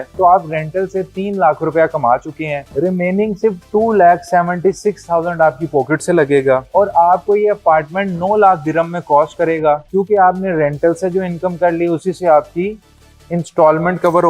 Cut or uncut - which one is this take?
uncut